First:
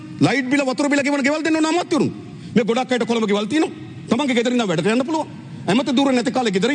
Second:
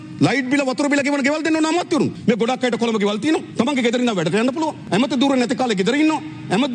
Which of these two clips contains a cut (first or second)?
second